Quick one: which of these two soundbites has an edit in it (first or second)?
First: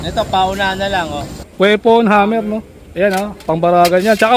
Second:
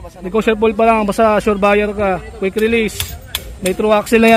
first